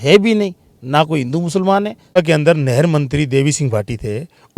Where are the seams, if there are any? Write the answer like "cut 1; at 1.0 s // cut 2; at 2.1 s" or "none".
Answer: cut 1; at 2.2 s